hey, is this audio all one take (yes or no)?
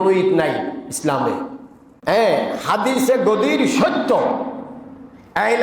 no